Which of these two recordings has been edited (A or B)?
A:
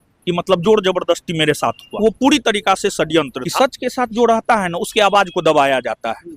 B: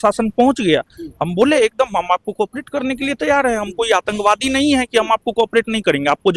A